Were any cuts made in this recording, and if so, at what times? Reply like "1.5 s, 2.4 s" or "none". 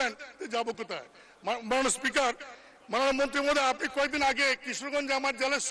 none